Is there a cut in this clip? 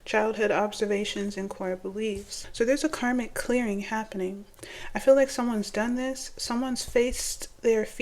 yes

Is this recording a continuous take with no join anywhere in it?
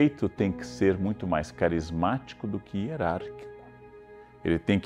yes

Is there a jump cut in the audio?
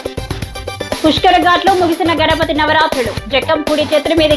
yes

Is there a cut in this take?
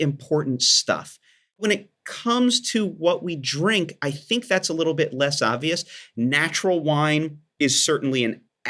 yes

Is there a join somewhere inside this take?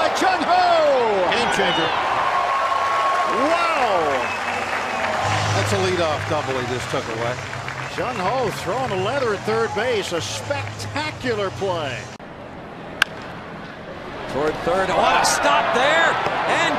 no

